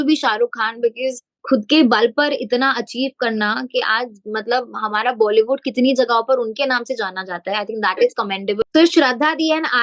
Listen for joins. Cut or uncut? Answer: cut